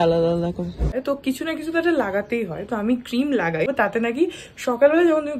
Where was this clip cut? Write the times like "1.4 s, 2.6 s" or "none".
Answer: 0.9 s, 3.7 s